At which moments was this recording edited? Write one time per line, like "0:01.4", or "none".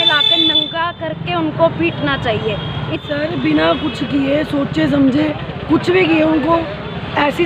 0:02.9